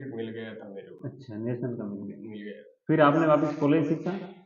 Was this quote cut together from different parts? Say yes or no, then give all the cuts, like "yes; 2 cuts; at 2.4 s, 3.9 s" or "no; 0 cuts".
no; 0 cuts